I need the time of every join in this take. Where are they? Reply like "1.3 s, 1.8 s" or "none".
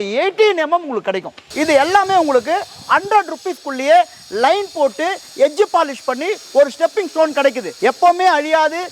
1.5 s, 7.7 s